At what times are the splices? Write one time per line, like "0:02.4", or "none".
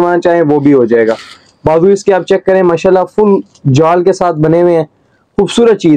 none